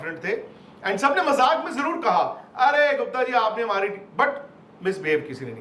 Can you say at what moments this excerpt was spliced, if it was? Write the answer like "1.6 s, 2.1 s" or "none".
none